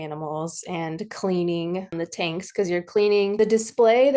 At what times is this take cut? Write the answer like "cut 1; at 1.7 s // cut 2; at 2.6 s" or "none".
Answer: cut 1; at 1.9 s // cut 2; at 3.4 s